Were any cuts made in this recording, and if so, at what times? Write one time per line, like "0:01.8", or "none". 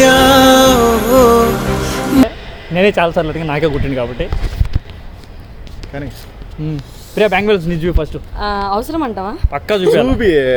none